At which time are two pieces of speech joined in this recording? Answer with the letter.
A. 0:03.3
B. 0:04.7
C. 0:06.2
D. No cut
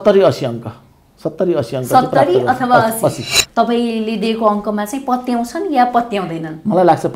A